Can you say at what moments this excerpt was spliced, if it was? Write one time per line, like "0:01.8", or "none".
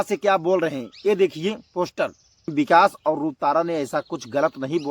0:02.5